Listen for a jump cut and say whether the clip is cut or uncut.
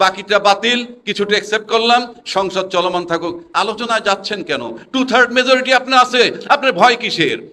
uncut